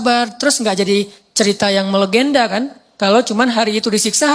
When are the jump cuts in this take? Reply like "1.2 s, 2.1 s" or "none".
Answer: none